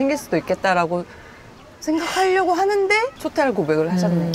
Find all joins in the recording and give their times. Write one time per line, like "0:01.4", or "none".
0:03.2